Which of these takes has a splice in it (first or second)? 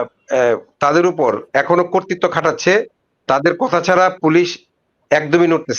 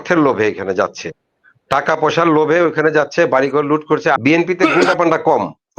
second